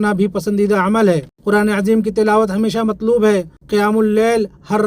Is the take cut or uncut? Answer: cut